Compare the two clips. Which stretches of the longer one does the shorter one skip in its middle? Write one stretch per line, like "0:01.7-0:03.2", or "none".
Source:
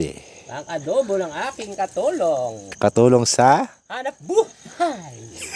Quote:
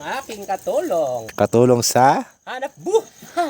0:02.5-0:02.7